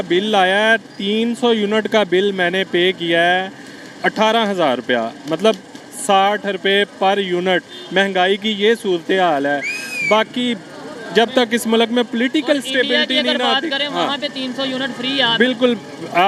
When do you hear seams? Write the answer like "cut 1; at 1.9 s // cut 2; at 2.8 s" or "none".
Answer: none